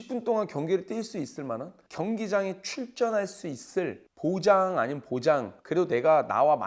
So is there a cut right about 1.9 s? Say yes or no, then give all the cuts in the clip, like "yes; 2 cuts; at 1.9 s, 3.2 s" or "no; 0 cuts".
no; 2 cuts; at 4.0 s, 5.6 s